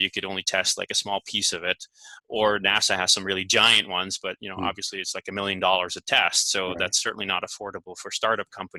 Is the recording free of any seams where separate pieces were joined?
yes; 0 cuts

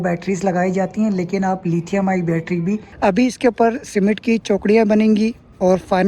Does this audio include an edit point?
yes; 1 cut; at 2.9 s

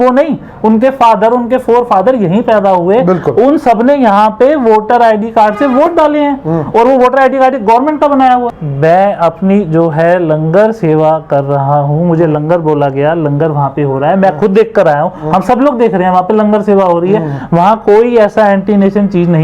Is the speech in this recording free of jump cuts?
no; 1 cut; at 8.5 s

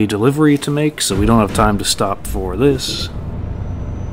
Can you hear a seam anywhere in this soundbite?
yes; 1 cut; at 2.8 s

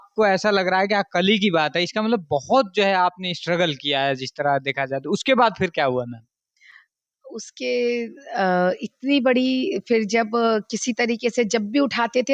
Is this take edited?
no; 0 cuts

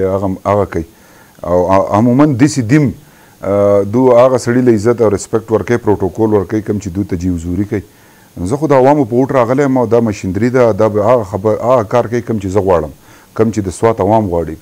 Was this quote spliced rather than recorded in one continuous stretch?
no; 0 cuts

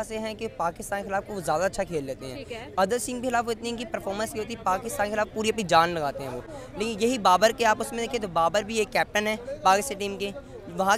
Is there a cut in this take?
no; 0 cuts

